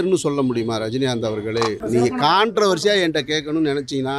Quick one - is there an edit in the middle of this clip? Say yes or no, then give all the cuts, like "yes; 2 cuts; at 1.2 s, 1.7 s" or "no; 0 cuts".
yes; 1 cut; at 1.8 s